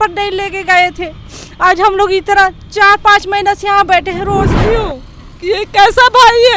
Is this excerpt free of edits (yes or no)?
no